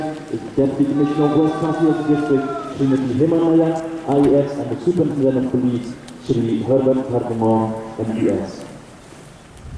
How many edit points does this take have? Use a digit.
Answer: 0